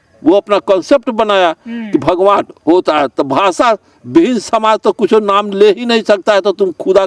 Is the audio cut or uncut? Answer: uncut